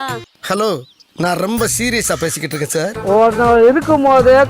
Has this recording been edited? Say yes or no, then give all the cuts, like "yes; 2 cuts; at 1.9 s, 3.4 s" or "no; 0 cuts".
yes; 1 cut; at 3.0 s